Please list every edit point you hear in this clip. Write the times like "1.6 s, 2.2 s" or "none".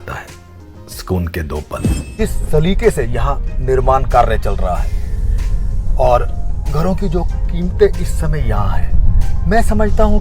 2.0 s